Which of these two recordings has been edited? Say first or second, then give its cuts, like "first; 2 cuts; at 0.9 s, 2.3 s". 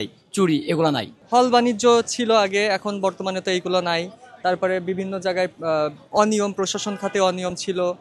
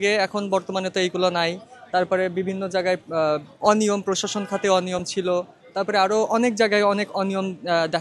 first; 1 cut; at 1.2 s